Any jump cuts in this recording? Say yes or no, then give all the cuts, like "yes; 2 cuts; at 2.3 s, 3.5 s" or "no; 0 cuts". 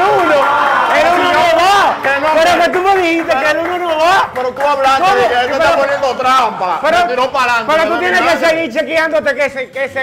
no; 0 cuts